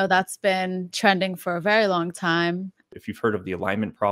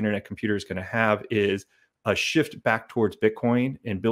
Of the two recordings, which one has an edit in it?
first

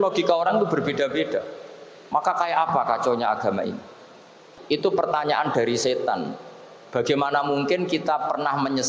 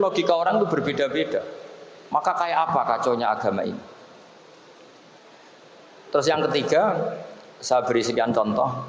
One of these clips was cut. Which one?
first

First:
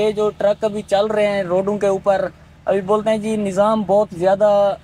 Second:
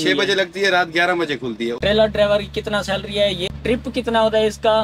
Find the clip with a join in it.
second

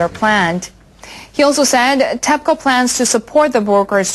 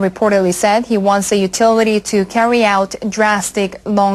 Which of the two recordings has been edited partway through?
first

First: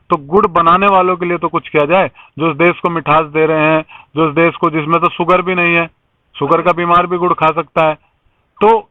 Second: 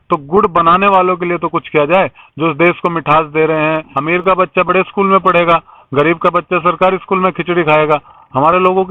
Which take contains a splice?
second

